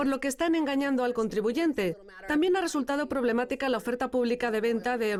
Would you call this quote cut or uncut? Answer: uncut